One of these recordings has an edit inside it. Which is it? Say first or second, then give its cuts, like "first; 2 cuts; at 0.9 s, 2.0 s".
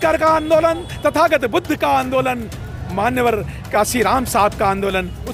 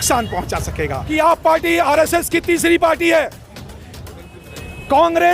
second; 1 cut; at 1.0 s